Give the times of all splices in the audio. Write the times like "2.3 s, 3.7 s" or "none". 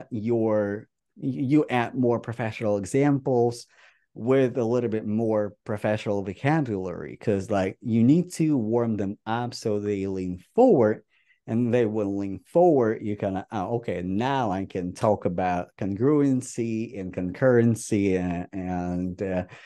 0.9 s